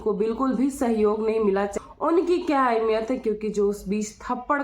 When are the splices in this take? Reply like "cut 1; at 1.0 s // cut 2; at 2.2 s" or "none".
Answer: cut 1; at 1.7 s

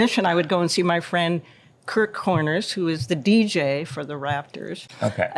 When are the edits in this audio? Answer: none

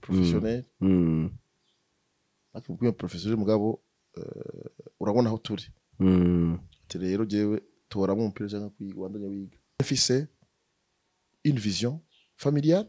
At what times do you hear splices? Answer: cut 1; at 9.9 s

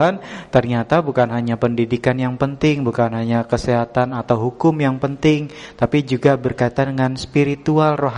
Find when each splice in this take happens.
none

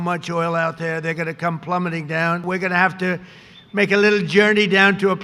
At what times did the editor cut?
cut 1; at 2.4 s

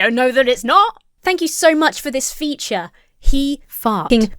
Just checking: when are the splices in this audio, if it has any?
cut 1; at 1.1 s

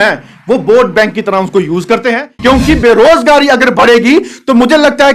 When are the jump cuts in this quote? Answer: cut 1; at 2.3 s

